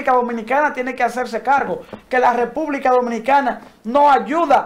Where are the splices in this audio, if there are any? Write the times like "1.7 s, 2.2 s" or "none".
none